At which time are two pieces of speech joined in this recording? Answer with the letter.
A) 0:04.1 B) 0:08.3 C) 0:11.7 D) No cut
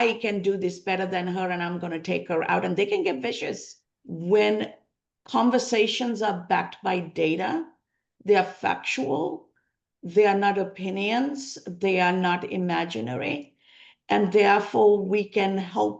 A